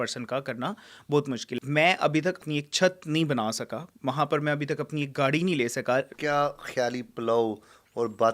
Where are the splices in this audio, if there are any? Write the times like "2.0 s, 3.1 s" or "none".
1.6 s, 2.4 s, 6.1 s